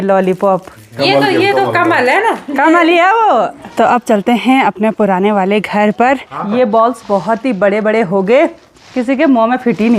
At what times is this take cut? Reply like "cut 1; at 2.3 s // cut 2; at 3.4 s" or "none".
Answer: cut 1; at 3.6 s // cut 2; at 6.3 s